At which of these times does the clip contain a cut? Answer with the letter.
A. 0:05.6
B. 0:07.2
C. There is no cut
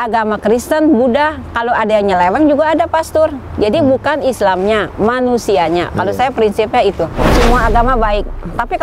B